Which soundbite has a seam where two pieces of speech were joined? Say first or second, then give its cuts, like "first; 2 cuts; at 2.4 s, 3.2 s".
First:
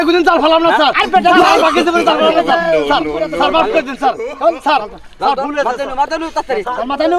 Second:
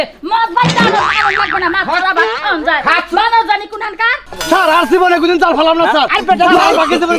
second; 1 cut; at 4.2 s